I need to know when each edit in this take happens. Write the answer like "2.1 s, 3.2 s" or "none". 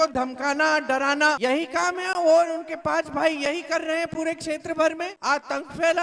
1.4 s, 5.1 s